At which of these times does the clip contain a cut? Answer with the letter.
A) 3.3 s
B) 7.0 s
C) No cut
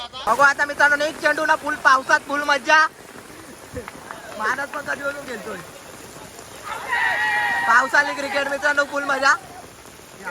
A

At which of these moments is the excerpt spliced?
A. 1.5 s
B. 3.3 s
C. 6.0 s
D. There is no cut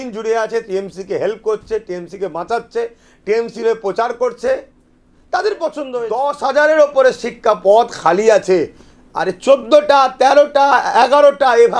C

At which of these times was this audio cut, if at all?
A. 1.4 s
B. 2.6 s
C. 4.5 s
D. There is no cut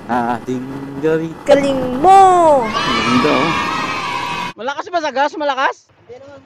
C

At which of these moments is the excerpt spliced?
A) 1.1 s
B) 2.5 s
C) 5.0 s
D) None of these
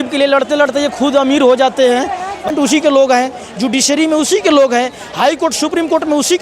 B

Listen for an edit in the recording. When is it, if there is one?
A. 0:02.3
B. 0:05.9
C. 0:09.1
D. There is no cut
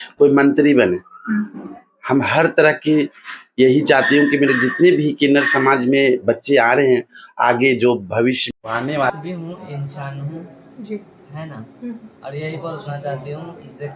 C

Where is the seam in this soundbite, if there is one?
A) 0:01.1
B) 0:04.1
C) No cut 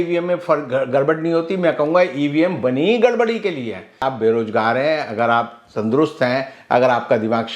B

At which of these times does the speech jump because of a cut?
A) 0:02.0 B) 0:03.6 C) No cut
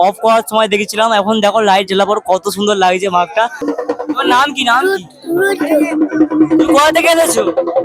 B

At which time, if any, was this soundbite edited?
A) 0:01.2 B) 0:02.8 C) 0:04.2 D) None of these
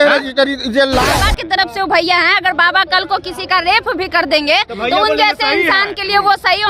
A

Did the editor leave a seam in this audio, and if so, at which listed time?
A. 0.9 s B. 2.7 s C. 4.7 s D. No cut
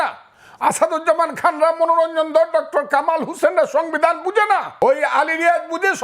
C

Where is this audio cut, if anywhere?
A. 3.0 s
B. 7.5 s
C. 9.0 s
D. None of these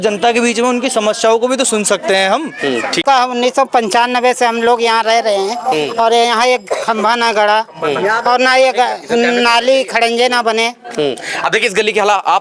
A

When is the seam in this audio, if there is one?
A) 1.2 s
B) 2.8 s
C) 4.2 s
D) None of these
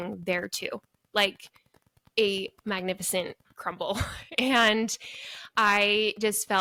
D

